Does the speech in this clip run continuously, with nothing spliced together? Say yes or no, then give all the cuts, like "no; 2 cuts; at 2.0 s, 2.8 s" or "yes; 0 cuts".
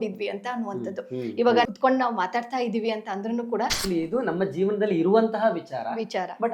no; 2 cuts; at 1.7 s, 3.8 s